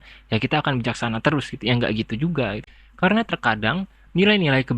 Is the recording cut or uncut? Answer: cut